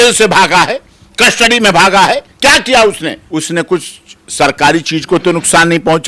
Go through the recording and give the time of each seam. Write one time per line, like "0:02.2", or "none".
0:03.2